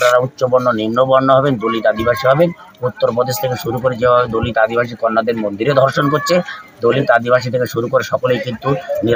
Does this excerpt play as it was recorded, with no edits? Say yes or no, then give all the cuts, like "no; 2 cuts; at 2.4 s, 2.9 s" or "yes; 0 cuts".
yes; 0 cuts